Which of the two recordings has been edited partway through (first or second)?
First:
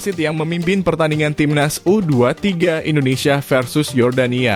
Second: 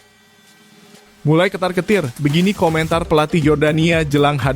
second